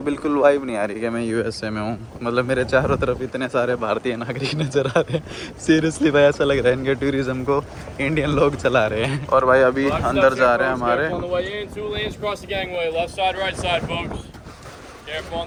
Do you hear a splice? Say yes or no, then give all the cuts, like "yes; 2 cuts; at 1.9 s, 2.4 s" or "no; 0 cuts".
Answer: no; 0 cuts